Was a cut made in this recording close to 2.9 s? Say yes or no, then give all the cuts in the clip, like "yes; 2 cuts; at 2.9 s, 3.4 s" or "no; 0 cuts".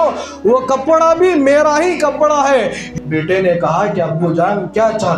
yes; 1 cut; at 2.9 s